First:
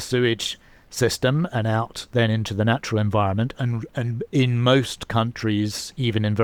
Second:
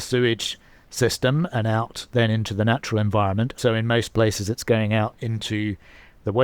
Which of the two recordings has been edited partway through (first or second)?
second